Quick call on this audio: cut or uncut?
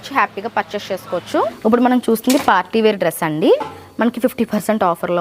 cut